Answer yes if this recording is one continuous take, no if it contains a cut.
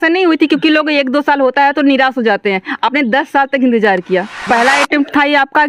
no